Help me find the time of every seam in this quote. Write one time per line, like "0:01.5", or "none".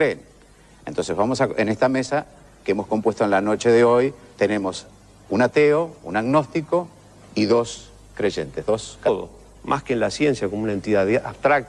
none